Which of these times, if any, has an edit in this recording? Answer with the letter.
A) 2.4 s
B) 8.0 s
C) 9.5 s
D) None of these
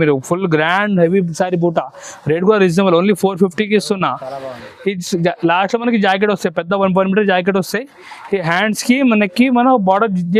D